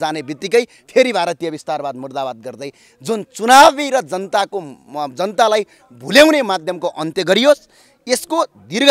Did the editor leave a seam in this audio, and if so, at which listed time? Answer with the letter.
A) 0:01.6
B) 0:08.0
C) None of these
C